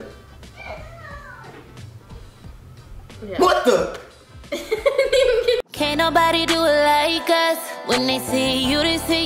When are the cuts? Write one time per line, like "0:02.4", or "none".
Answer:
0:05.7